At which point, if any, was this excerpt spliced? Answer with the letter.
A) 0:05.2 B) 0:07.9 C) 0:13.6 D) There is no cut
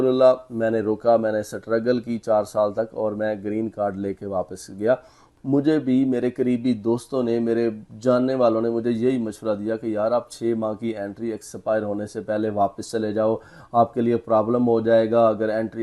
A